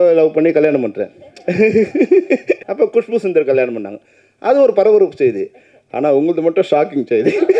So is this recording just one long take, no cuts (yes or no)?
no